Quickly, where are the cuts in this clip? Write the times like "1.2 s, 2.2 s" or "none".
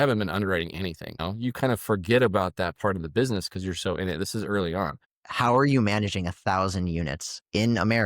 1.1 s, 5.1 s